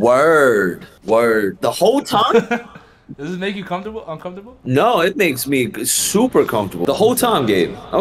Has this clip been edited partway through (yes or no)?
no